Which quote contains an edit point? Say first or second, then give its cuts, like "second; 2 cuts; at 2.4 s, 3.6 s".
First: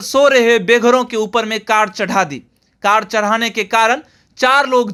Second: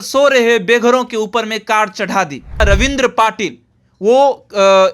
second; 1 cut; at 2.6 s